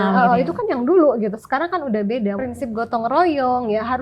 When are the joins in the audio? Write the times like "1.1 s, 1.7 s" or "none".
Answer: 2.4 s